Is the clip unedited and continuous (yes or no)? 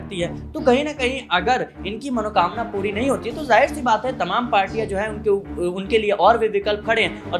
yes